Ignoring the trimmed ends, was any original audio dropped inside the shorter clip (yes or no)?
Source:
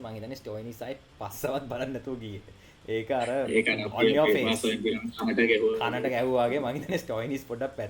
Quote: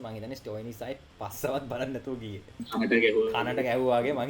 yes